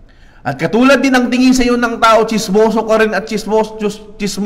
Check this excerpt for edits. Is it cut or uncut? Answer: uncut